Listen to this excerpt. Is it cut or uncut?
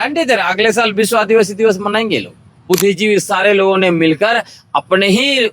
cut